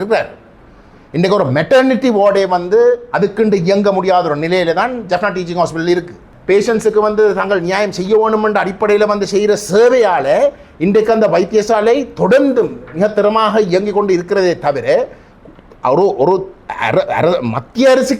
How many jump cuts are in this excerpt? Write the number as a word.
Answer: one